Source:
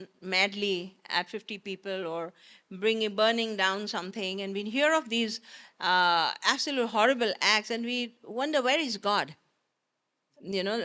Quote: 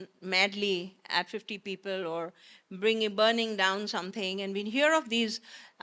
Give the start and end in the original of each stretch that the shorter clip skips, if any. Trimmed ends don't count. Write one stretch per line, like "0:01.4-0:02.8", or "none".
none